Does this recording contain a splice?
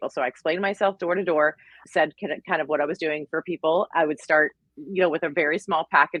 no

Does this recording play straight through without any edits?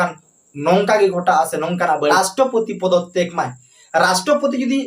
no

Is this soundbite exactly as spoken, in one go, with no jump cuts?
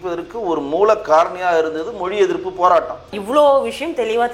no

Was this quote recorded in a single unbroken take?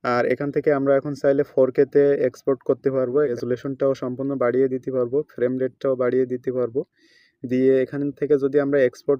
no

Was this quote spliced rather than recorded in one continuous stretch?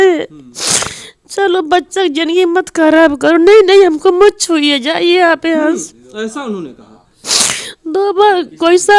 no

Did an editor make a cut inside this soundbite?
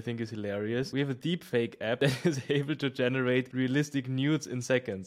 yes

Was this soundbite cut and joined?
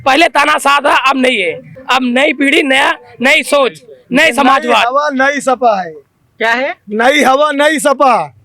no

